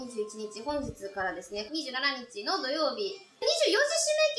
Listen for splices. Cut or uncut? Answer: cut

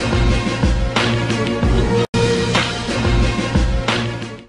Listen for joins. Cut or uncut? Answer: uncut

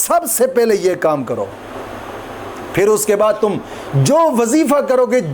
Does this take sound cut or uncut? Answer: uncut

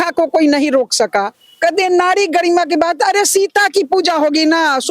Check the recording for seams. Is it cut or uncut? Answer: cut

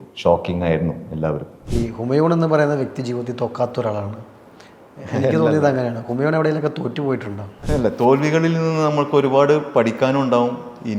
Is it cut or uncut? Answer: cut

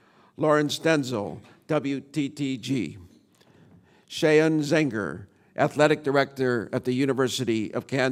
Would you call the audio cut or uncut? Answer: uncut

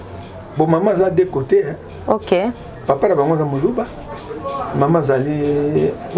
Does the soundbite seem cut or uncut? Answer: uncut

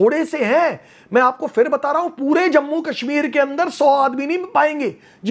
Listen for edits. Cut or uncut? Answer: uncut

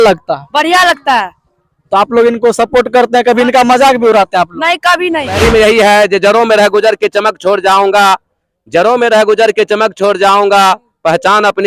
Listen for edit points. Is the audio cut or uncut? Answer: cut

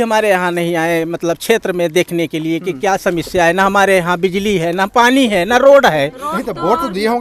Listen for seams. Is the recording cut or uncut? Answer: uncut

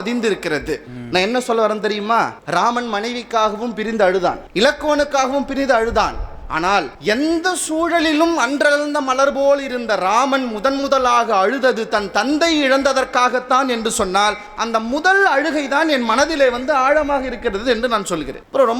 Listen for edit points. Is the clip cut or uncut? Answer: uncut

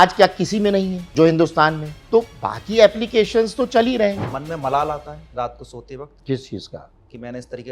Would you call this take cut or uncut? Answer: cut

